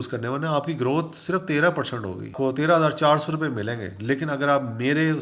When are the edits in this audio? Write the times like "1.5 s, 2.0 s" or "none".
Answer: 2.3 s

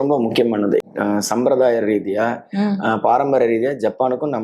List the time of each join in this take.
0.9 s

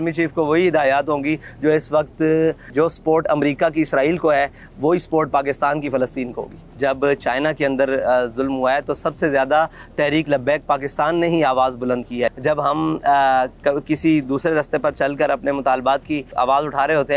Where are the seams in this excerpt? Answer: 2.6 s, 6.6 s, 12.4 s

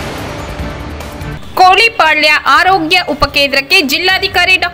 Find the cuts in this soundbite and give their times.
1.3 s

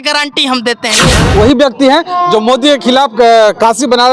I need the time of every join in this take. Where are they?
1.2 s

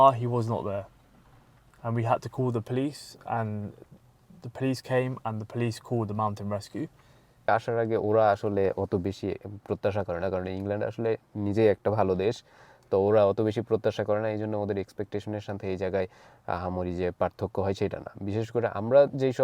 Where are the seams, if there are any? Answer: 7.5 s

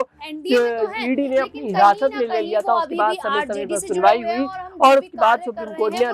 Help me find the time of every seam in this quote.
none

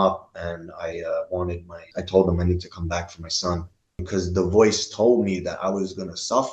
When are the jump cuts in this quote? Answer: 1.9 s, 4.0 s

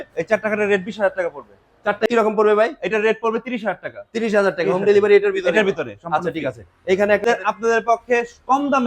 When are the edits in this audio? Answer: 2.1 s, 7.2 s

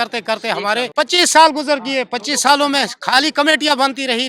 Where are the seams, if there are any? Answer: 0.9 s

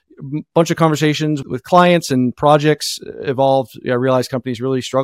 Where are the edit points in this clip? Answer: none

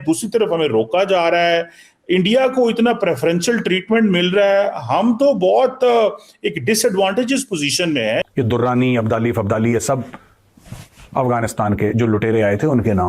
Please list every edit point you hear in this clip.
8.2 s

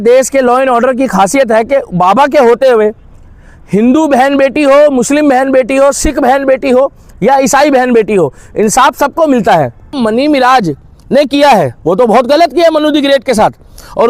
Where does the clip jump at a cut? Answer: 10.0 s

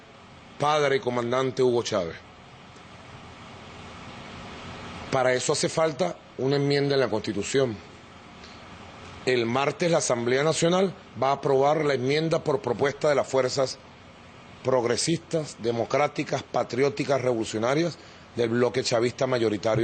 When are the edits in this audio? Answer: 16.2 s

